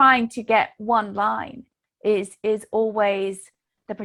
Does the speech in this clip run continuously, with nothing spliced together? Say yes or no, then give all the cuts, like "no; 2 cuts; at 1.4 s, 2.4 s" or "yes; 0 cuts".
yes; 0 cuts